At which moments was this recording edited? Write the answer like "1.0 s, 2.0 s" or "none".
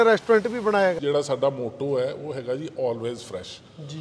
1.0 s

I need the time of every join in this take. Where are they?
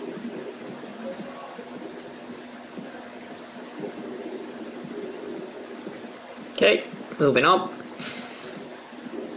4.4 s

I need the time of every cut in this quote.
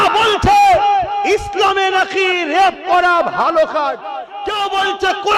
4.4 s

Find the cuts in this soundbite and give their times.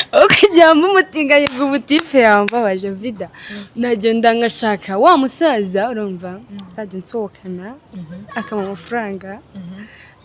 none

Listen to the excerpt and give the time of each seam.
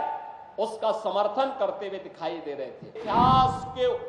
3.0 s

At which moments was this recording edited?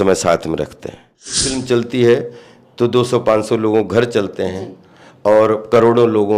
1.5 s

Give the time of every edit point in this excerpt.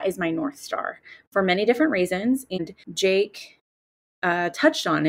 2.5 s

